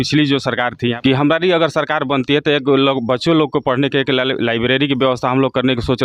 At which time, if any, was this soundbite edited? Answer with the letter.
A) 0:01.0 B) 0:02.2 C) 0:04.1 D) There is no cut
A